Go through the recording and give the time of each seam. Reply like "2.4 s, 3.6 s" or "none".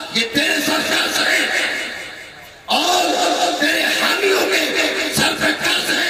none